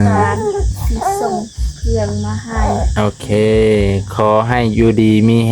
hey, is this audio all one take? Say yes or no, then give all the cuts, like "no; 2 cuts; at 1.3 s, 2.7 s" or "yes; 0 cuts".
yes; 0 cuts